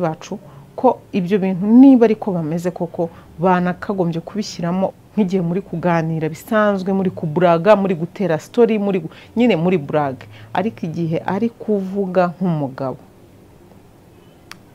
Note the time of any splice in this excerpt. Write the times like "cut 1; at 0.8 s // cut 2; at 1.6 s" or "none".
cut 1; at 5.0 s